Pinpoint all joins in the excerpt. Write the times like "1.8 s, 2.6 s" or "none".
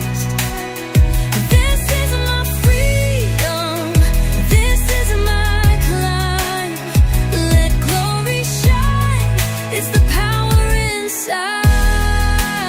none

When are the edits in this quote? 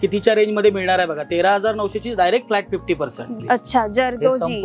3.3 s

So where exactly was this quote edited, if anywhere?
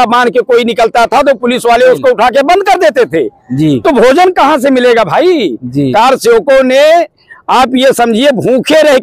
none

